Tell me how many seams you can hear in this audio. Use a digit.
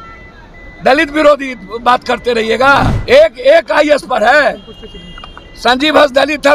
1